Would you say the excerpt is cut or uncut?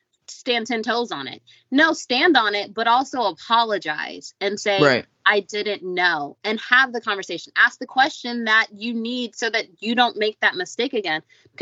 uncut